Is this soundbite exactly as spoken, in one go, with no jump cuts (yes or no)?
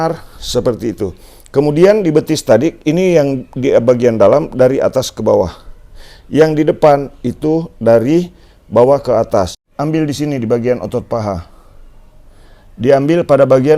no